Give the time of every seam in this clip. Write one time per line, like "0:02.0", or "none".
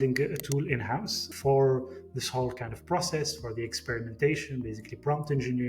0:01.3